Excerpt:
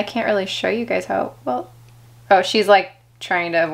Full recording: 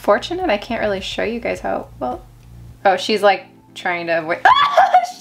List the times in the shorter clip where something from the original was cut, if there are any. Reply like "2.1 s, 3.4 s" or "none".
none